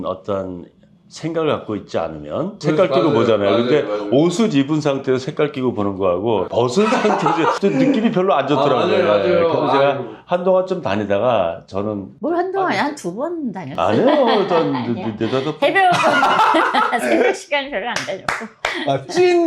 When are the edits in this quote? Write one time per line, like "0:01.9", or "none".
none